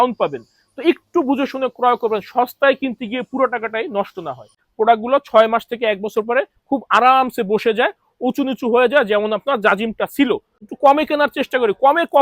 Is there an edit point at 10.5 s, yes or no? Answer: yes